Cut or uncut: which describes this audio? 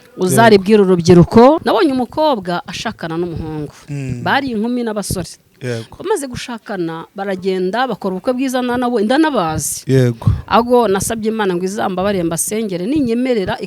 cut